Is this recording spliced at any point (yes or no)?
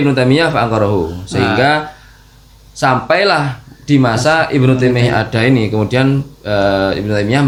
no